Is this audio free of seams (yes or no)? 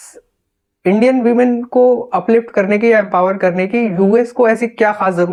yes